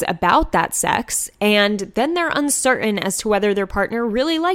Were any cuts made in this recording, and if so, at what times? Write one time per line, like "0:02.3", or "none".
none